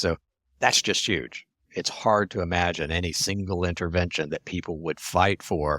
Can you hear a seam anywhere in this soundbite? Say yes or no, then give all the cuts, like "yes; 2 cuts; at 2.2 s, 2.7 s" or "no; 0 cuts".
yes; 1 cut; at 1.7 s